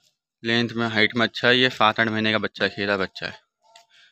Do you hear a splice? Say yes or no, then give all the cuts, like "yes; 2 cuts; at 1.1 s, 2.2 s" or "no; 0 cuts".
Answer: no; 0 cuts